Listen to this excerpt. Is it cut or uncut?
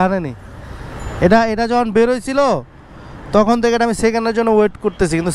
uncut